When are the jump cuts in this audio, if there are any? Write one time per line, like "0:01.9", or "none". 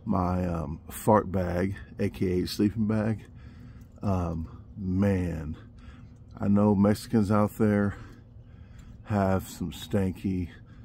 none